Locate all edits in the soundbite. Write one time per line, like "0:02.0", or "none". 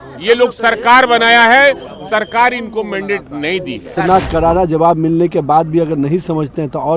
0:03.9